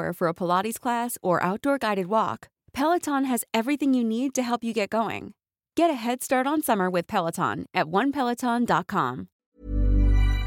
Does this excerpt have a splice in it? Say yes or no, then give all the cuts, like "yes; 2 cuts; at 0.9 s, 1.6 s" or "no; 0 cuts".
yes; 1 cut; at 9.3 s